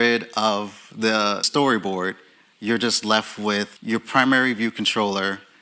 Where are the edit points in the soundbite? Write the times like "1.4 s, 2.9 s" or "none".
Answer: 1.5 s, 3.8 s